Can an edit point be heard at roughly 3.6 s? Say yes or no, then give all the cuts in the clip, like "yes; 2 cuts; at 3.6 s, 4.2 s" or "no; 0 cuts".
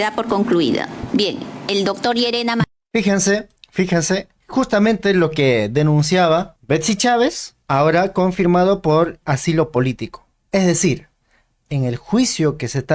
yes; 5 cuts; at 1.0 s, 2.8 s, 3.6 s, 6.5 s, 7.5 s